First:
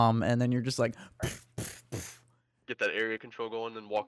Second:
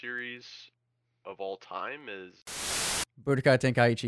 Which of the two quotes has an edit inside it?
second; 1 cut; at 2.9 s

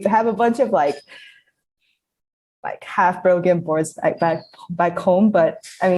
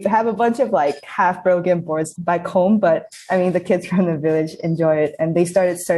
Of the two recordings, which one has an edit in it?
second; 2 cuts; at 1.1 s, 2.1 s

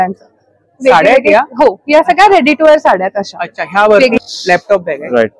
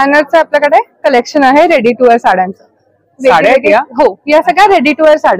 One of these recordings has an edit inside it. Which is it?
first; 1 cut; at 4.2 s

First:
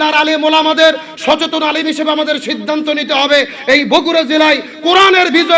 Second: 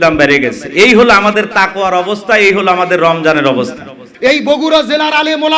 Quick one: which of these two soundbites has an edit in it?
second; 1 cut; at 4.0 s

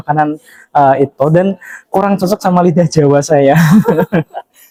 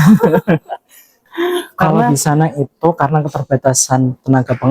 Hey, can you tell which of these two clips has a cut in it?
second; 1 cut; at 2.1 s

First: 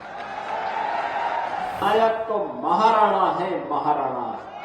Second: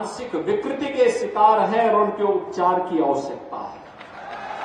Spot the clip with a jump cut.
first; 1 cut; at 1.8 s

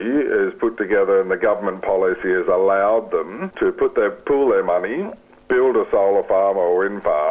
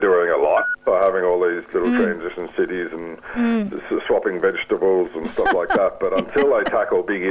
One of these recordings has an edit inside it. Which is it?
first; 1 cut; at 3.4 s

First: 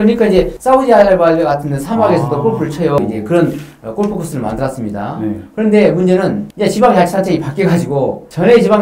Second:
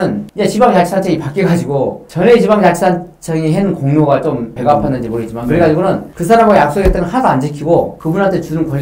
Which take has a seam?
first; 1 cut; at 3.0 s

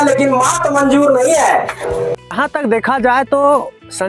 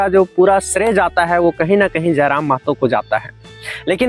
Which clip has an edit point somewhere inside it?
first; 1 cut; at 2.3 s

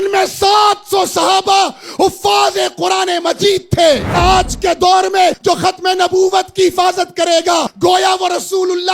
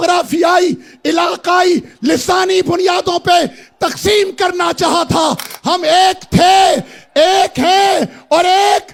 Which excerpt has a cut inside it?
first; 3 cuts; at 4.2 s, 5.4 s, 7.7 s

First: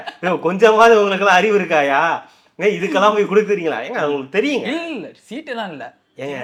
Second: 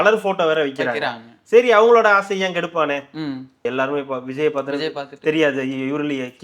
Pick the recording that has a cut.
second; 1 cut; at 3.6 s

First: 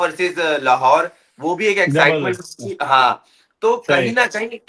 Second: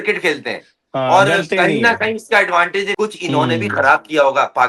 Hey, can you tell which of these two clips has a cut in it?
second; 1 cut; at 2.9 s

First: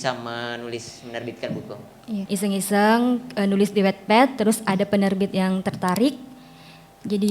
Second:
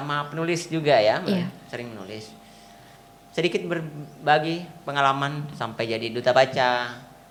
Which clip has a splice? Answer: first; 1 cut; at 2.2 s

